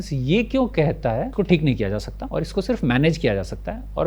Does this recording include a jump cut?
yes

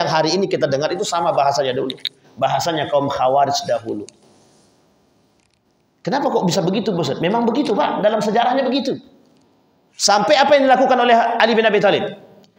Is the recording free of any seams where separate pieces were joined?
yes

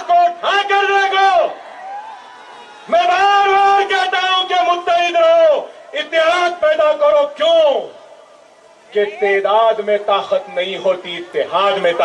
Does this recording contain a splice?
no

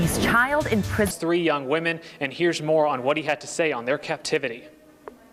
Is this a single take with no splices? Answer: yes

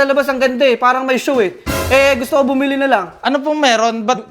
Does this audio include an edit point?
yes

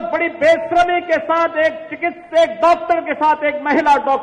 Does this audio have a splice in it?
no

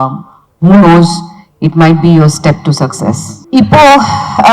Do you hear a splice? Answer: yes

